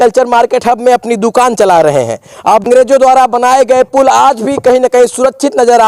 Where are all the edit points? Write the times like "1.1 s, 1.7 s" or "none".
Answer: 2.7 s

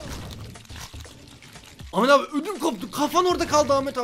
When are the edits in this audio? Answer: none

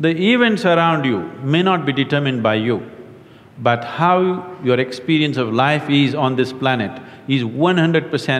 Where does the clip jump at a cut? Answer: none

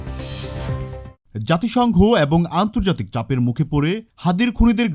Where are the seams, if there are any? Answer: 1.2 s

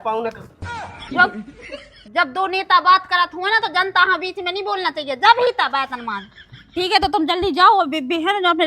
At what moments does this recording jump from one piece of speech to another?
6.6 s

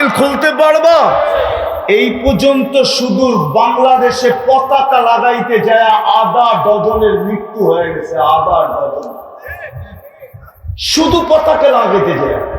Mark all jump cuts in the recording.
10.8 s

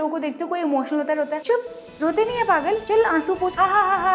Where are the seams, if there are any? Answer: none

